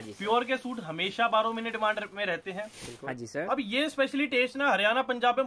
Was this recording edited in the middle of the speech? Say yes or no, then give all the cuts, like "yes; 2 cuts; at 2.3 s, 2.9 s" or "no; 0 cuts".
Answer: yes; 1 cut; at 3.0 s